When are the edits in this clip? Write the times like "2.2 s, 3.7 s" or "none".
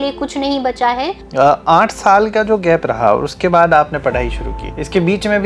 1.2 s